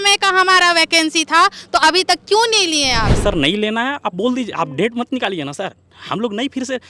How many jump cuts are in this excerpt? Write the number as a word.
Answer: one